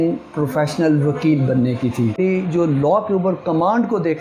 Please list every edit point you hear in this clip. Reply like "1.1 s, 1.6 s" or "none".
2.2 s